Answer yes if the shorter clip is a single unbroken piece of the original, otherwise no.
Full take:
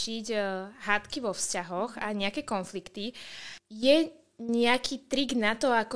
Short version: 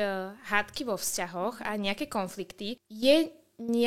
no